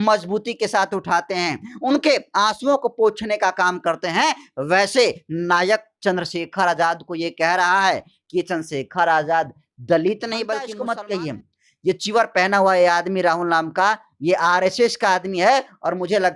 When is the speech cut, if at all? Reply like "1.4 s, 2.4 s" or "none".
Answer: 10.7 s